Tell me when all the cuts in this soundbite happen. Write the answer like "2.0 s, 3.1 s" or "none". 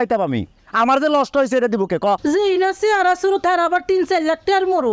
2.2 s